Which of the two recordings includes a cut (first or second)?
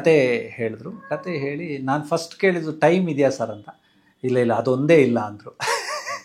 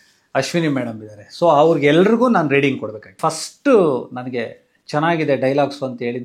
second